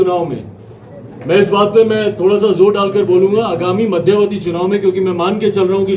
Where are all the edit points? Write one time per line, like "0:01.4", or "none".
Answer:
none

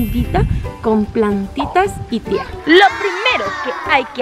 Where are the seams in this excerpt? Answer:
0:02.5

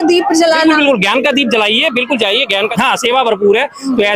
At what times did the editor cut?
0:02.7

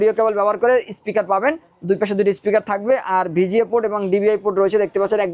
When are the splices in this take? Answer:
none

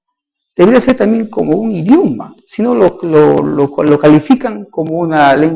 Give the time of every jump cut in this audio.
0:01.3

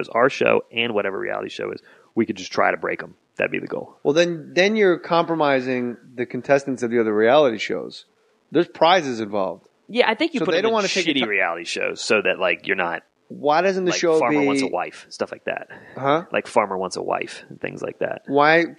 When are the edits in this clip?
none

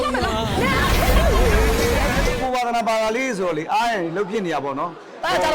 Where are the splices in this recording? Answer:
none

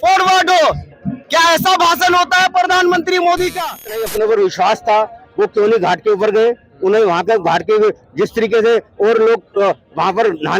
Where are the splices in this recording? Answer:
0:04.0

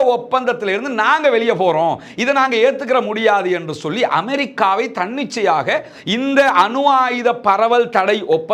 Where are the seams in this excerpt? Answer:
none

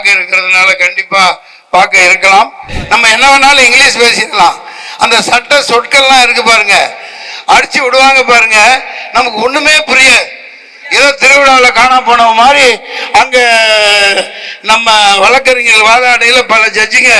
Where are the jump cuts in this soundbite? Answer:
0:02.7

